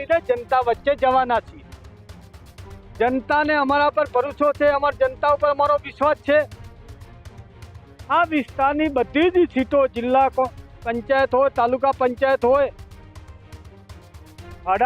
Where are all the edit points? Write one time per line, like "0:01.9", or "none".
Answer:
none

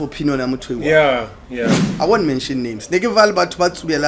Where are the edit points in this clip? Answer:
0:01.7

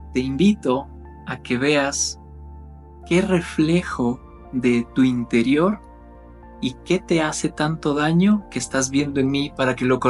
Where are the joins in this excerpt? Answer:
none

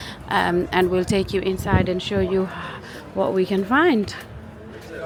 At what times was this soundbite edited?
none

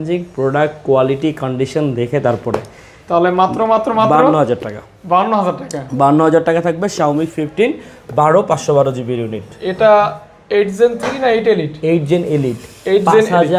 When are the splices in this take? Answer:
none

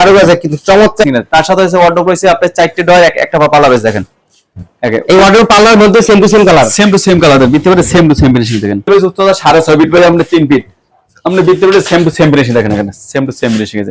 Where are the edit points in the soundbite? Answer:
0:01.0
0:08.9

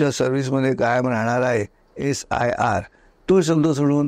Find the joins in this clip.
none

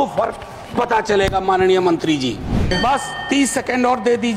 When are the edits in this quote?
0:02.7

